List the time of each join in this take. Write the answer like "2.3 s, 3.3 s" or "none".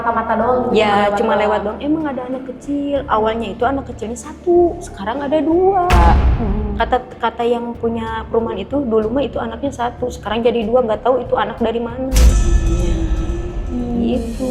none

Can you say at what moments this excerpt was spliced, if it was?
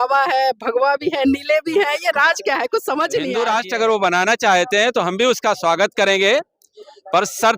3.3 s

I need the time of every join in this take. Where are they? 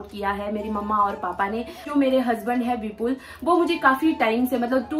1.8 s

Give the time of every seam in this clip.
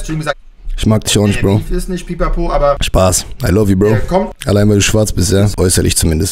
2.8 s, 4.4 s, 5.5 s

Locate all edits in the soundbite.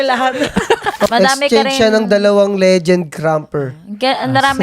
1.1 s

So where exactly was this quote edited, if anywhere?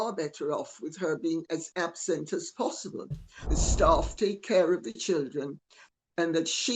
3.6 s

